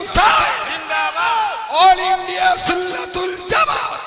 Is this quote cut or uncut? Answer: uncut